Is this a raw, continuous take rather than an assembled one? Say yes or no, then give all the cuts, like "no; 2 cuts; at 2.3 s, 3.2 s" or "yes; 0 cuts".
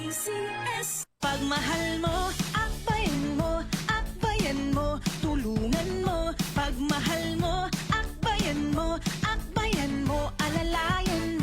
no; 1 cut; at 1.0 s